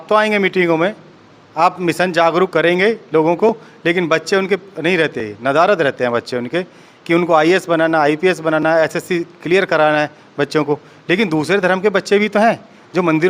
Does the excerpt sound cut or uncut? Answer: uncut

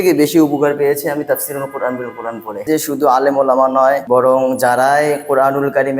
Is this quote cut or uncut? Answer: cut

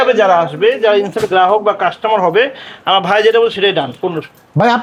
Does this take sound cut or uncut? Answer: uncut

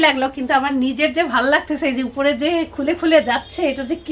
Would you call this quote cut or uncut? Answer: uncut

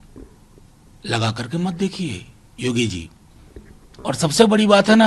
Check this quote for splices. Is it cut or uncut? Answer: uncut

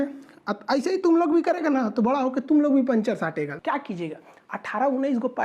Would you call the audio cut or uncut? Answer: cut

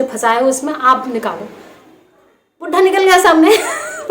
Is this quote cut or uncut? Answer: uncut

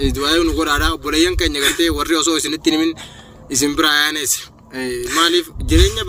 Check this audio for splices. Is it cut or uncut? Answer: uncut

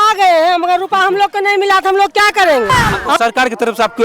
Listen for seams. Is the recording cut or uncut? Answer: cut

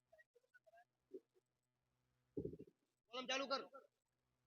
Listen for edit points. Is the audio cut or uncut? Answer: cut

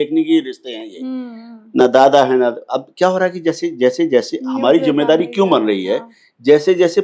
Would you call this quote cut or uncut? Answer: uncut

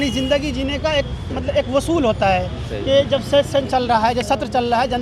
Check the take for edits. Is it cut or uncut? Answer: uncut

